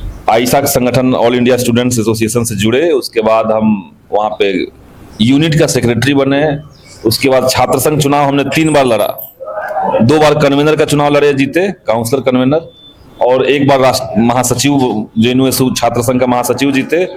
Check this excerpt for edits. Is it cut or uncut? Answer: uncut